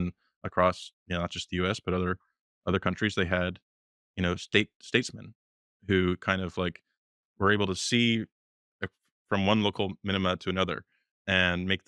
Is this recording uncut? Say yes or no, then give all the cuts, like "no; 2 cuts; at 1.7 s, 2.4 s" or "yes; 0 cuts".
yes; 0 cuts